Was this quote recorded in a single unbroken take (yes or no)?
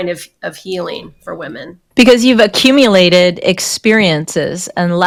yes